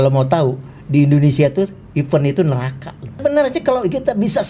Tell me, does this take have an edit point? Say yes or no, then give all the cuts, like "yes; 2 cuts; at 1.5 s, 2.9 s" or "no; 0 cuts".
yes; 1 cut; at 3.2 s